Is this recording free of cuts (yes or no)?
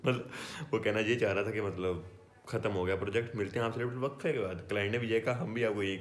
yes